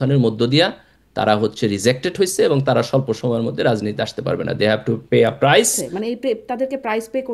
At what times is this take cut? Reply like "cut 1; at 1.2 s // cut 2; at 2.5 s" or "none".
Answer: cut 1; at 5.9 s